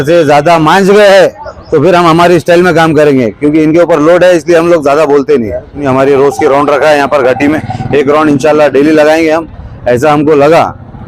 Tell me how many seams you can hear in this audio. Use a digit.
1